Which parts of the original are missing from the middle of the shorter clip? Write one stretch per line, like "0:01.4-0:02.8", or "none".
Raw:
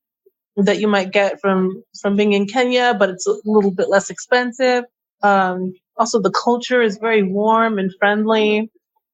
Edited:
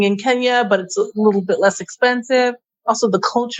0:05.0-0:05.8